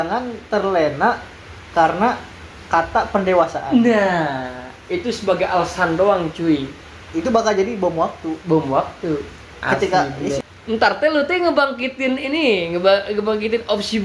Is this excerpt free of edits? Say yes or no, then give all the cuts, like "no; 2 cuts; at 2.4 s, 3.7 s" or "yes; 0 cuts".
no; 1 cut; at 10.5 s